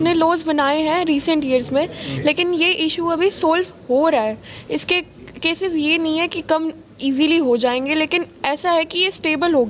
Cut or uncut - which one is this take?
uncut